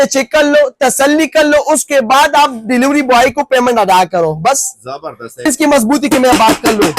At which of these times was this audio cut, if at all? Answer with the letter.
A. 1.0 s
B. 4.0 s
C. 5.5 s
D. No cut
C